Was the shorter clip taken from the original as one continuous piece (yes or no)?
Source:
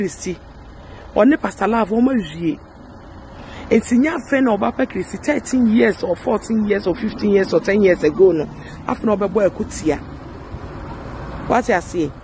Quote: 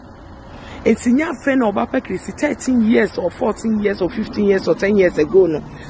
yes